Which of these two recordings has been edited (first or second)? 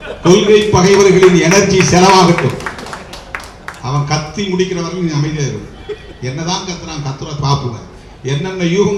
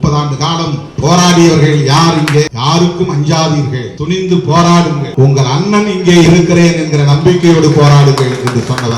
second